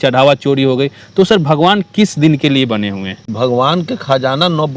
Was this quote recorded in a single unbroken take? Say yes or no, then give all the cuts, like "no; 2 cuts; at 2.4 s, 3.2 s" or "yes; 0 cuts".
no; 1 cut; at 3.2 s